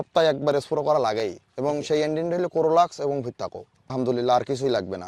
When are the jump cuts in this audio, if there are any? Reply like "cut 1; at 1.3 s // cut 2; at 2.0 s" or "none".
cut 1; at 3.9 s